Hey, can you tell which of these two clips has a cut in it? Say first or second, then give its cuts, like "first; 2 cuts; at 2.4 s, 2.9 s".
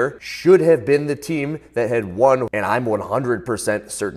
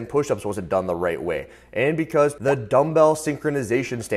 first; 1 cut; at 2.5 s